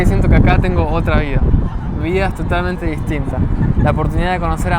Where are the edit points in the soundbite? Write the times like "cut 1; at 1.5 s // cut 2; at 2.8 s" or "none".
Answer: none